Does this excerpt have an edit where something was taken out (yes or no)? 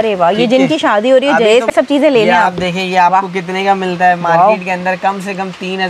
yes